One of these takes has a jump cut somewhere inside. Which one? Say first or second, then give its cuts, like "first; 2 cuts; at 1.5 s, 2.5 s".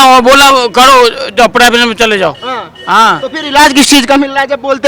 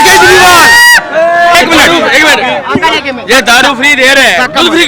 second; 1 cut; at 1.5 s